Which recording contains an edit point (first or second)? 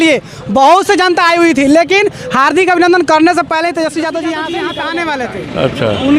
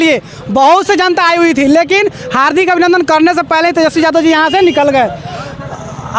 first